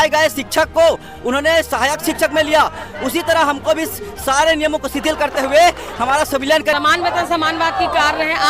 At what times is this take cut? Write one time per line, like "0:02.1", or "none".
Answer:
0:06.7